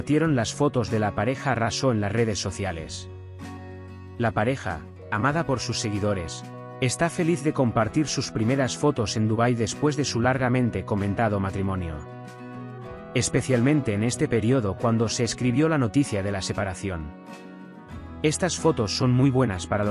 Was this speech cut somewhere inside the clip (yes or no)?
no